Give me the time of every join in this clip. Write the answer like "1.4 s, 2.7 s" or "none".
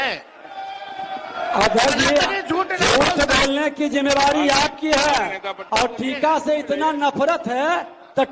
5.5 s